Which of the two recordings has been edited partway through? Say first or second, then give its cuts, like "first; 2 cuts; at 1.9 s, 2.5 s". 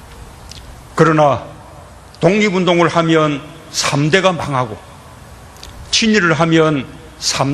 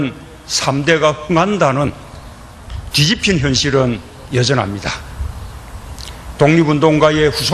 first; 1 cut; at 3.7 s